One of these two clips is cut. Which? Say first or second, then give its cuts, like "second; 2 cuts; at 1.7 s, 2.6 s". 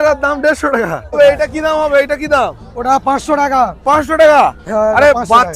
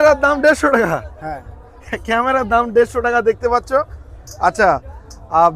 first; 1 cut; at 1.2 s